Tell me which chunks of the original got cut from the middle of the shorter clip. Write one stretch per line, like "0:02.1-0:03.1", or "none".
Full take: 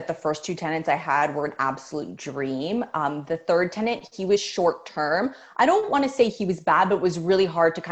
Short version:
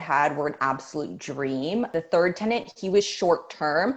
0:02.9-0:03.2